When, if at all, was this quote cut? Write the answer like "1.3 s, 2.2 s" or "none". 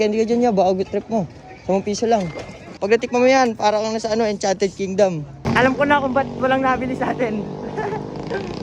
2.8 s, 5.3 s